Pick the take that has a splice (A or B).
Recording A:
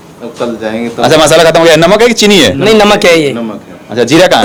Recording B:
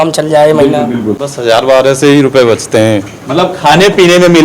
B